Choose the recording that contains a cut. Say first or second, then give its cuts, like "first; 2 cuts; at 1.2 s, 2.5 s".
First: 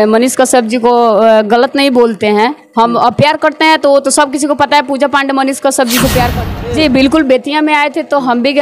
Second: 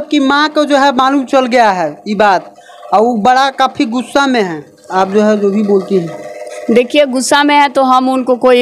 first; 1 cut; at 6.6 s